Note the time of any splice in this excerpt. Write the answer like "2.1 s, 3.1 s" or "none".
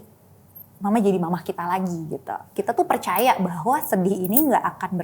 2.5 s